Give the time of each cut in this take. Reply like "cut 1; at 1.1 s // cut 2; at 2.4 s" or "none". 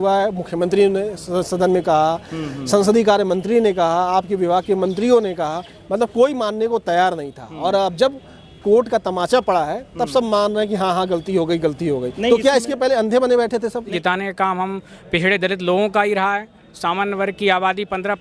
cut 1; at 13.9 s